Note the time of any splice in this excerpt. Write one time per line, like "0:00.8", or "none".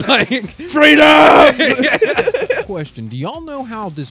0:02.6